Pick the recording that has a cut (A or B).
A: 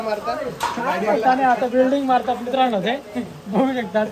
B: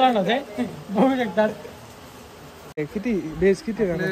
B